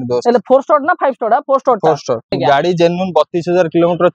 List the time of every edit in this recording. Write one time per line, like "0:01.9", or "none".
0:02.4